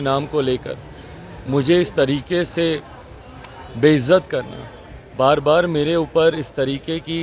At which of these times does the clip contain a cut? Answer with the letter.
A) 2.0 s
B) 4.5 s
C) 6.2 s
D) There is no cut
D